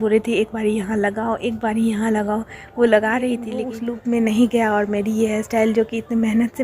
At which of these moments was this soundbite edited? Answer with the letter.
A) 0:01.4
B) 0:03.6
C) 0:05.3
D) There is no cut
B